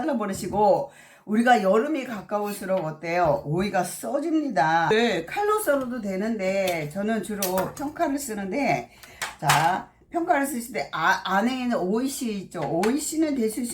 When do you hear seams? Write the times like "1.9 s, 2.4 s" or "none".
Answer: 4.9 s